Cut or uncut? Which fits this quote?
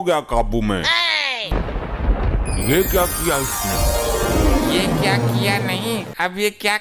cut